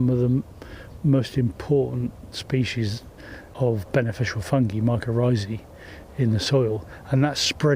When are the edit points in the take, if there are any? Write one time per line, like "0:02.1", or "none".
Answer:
none